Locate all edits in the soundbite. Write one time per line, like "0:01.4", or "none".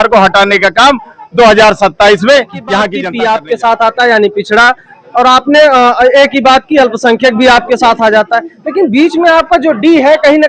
0:03.0